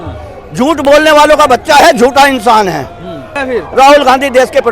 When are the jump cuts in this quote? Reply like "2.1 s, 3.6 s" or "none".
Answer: 3.4 s